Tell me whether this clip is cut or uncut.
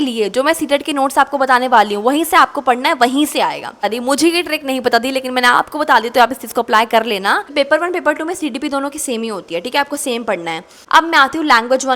cut